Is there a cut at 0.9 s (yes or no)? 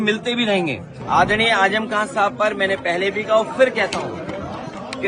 yes